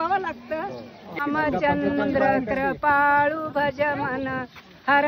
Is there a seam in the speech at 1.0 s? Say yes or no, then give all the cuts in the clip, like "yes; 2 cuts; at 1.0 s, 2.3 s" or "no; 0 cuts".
yes; 1 cut; at 1.0 s